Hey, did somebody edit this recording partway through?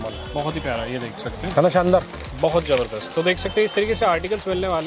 no; 0 cuts

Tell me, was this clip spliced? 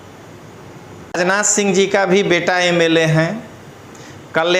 yes; 1 cut; at 1.2 s

